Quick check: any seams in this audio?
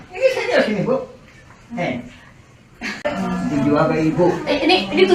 yes; 1 cut; at 3.1 s

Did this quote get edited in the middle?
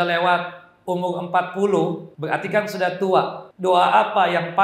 yes; 2 cuts; at 2.1 s, 3.4 s

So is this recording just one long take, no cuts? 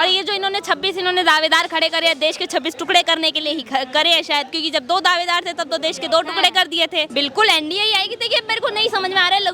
no; 1 cut; at 7.1 s

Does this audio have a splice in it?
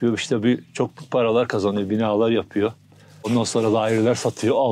yes; 1 cut; at 3.3 s

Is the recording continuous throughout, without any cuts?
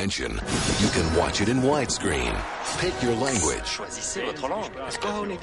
no; 1 cut; at 1.9 s

